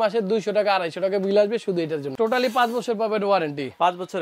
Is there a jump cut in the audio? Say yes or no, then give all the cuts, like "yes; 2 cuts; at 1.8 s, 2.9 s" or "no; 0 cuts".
yes; 1 cut; at 2.1 s